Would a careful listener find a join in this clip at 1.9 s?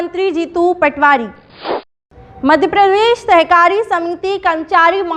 yes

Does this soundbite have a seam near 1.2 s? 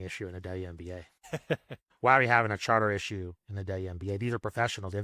yes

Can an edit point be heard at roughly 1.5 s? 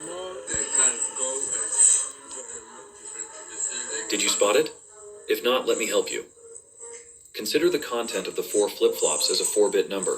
yes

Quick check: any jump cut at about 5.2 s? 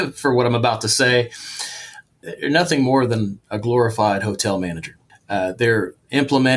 no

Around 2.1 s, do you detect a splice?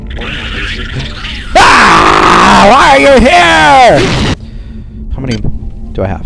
no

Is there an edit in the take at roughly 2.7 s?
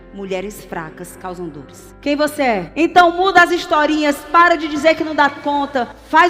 yes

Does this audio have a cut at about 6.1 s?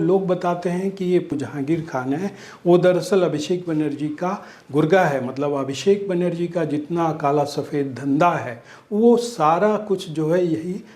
no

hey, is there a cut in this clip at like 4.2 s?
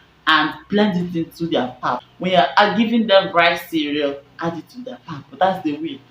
no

